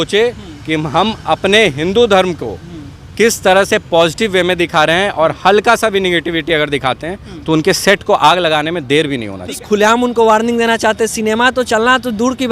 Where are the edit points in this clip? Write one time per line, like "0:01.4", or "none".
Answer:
0:09.5